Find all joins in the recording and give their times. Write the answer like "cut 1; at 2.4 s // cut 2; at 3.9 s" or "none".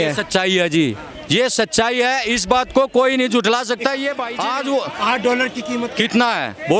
cut 1; at 4.2 s